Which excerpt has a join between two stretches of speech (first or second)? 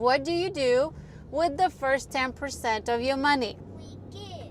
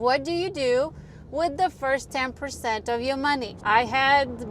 second